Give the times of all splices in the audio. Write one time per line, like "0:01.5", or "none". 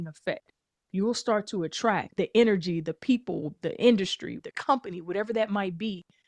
0:02.1
0:04.4

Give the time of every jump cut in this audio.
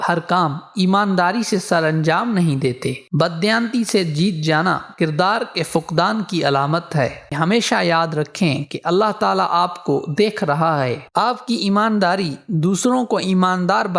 0:03.0
0:07.2
0:11.0

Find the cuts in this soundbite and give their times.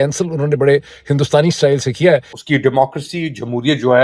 0:02.3

